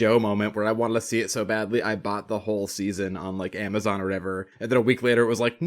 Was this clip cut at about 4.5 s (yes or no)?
yes